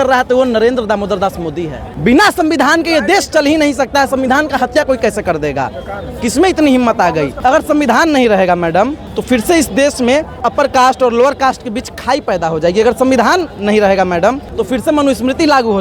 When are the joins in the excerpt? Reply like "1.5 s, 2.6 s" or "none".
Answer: 1.8 s, 7.3 s, 9.1 s, 10.5 s, 14.5 s